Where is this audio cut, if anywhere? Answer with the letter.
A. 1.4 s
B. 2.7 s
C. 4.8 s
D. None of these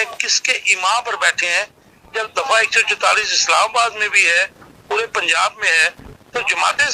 D